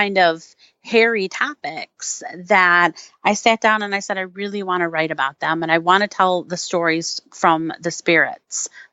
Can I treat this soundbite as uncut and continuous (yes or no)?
yes